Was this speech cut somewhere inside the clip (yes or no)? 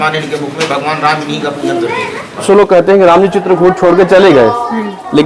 yes